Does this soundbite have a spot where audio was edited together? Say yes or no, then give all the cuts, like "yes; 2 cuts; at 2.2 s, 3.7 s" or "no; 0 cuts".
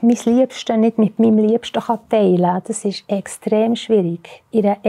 no; 0 cuts